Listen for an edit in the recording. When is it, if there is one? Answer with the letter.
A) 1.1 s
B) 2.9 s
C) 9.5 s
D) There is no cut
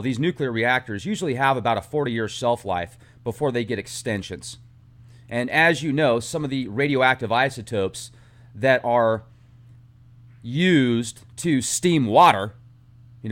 B